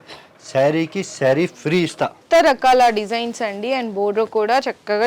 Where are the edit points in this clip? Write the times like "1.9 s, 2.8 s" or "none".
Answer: 2.2 s